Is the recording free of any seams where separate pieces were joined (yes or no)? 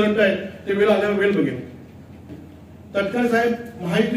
no